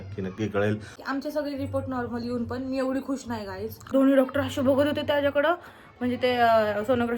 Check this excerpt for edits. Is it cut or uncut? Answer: cut